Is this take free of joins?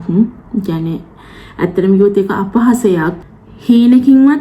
no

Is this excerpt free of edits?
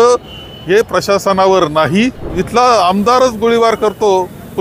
no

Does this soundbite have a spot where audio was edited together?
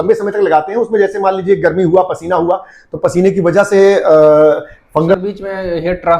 yes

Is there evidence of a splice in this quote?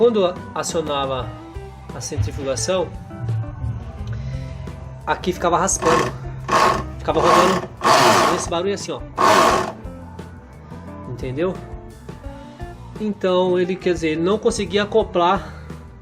yes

